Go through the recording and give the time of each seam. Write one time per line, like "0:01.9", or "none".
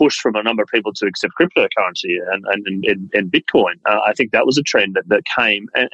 none